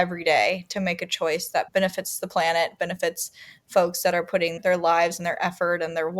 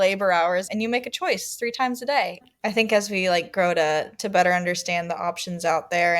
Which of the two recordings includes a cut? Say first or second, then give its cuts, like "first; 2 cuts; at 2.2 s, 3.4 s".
second; 1 cut; at 2.4 s